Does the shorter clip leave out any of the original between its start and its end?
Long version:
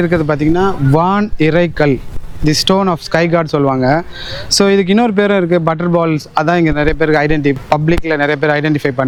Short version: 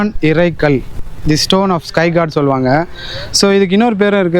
no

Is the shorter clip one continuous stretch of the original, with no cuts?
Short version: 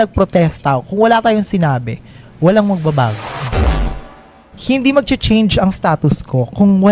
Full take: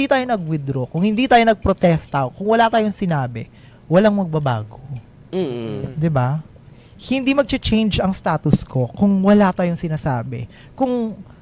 no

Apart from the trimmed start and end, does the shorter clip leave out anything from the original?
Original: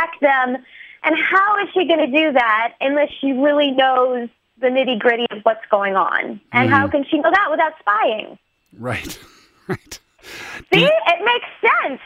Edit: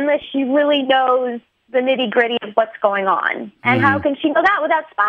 no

